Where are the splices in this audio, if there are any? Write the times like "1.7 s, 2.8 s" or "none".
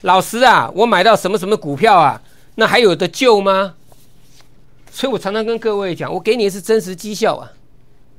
none